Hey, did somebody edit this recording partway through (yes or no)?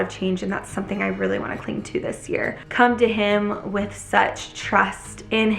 yes